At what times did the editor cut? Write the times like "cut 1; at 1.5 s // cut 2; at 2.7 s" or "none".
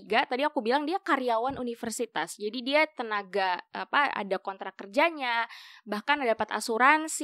none